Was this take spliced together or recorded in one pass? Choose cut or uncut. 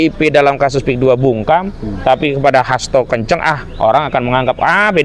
uncut